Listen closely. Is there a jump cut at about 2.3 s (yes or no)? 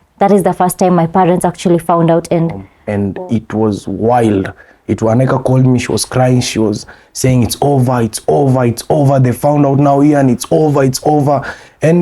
no